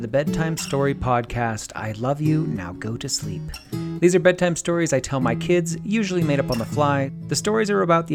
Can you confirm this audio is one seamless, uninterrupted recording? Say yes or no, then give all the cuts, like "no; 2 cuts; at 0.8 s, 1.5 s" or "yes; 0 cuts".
no; 1 cut; at 7.2 s